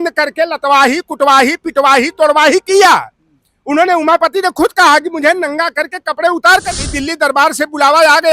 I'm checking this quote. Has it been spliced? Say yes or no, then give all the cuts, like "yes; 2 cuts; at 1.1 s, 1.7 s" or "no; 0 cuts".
yes; 1 cut; at 6.8 s